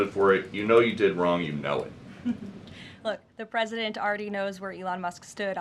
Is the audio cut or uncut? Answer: uncut